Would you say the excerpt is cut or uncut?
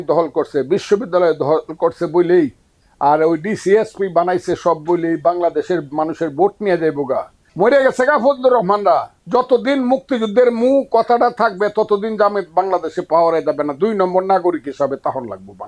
cut